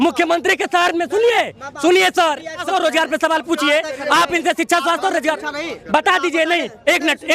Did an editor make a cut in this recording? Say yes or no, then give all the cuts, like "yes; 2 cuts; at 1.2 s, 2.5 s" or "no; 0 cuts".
yes; 1 cut; at 2.6 s